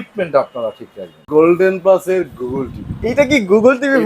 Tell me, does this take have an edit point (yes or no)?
yes